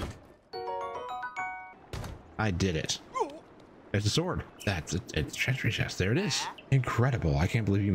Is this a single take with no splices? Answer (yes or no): no